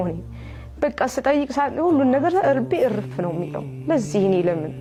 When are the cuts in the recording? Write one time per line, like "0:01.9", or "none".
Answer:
none